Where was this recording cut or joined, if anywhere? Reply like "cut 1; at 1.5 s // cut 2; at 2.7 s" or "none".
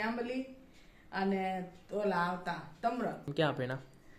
cut 1; at 3.3 s